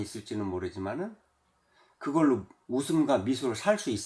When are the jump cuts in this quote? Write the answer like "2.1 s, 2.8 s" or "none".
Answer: 2.6 s